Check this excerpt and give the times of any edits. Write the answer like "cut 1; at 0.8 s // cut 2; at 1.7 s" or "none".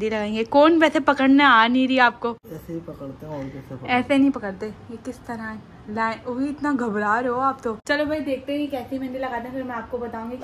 none